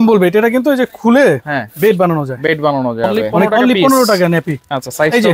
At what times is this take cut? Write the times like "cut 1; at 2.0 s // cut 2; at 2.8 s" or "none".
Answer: cut 1; at 3.4 s